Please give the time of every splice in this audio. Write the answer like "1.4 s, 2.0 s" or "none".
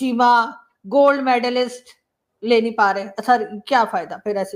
none